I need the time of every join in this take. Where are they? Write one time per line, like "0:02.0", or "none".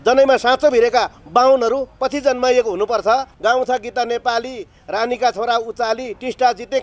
0:03.3